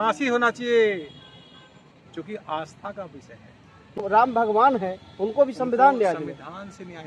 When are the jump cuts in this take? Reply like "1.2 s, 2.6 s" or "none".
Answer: 3.8 s